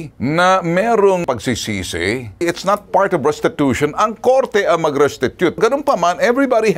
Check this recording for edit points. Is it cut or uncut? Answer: cut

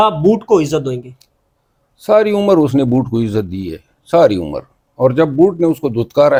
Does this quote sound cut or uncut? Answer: uncut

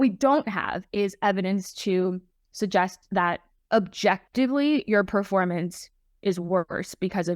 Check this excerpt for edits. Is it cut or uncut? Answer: uncut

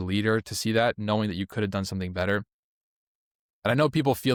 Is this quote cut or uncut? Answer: uncut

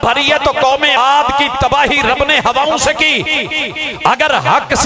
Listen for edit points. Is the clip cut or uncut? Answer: cut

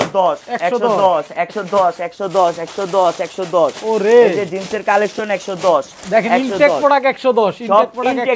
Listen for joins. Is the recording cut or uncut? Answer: uncut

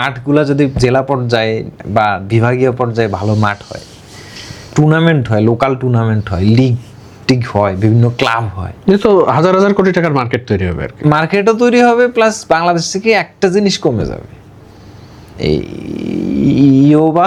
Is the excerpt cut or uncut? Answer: uncut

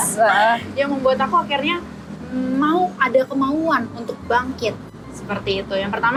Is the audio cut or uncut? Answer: uncut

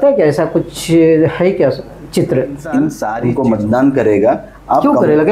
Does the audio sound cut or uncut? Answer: cut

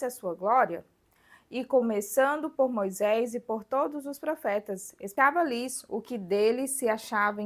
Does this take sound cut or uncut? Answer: cut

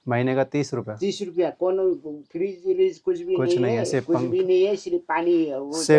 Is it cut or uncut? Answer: uncut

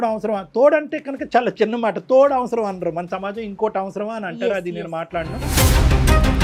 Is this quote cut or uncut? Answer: uncut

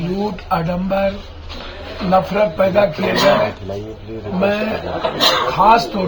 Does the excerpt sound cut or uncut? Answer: uncut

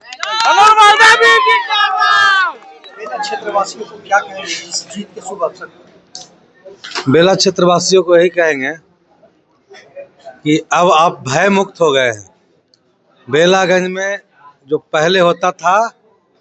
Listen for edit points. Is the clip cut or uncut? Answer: cut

